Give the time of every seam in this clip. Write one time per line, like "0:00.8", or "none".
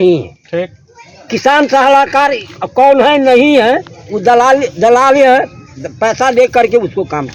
none